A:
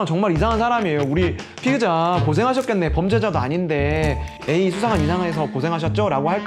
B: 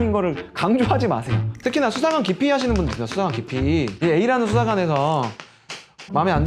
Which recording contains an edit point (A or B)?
B